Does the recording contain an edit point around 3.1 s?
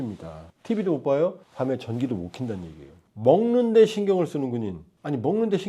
yes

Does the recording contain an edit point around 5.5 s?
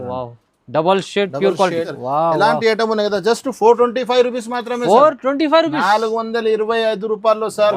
no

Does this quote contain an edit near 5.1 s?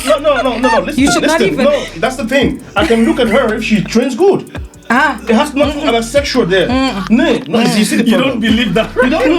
no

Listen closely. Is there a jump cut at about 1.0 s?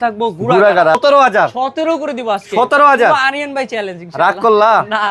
yes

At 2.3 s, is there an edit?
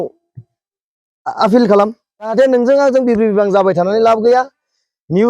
yes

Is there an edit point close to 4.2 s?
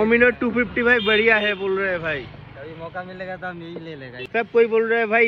yes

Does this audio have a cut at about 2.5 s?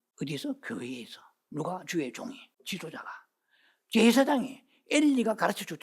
yes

